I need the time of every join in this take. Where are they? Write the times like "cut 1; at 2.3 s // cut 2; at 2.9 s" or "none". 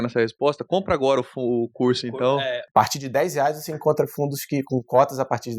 cut 1; at 2.6 s